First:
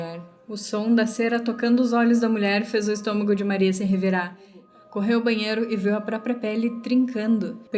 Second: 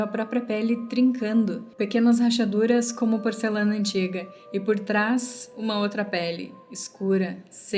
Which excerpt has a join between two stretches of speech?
first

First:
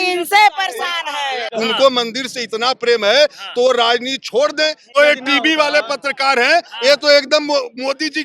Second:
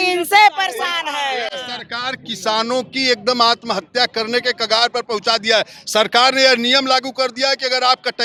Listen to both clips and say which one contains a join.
first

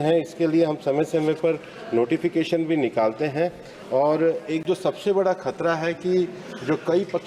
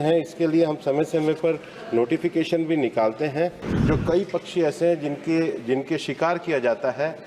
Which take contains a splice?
second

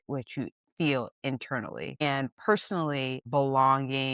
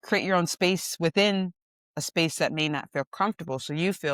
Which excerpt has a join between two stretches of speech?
first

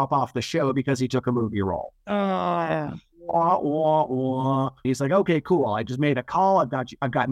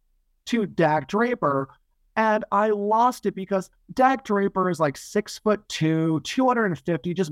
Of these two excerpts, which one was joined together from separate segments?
first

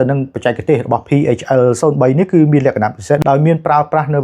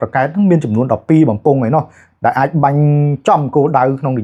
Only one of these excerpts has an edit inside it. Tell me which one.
first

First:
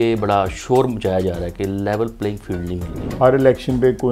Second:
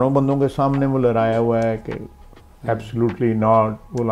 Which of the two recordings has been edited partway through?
first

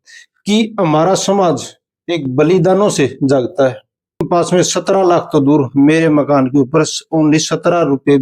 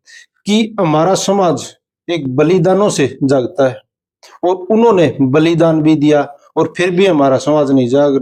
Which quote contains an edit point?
first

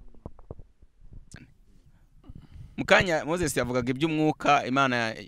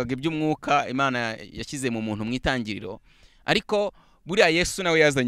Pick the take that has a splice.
first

